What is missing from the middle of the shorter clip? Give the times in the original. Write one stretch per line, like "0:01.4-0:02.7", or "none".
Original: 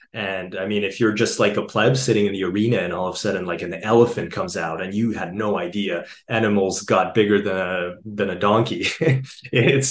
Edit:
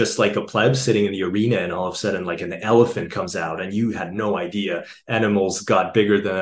none